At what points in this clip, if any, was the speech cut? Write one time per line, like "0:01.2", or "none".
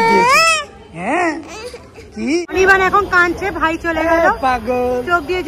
0:02.6